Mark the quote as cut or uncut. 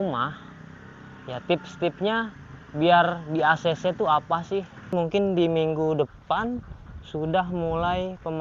cut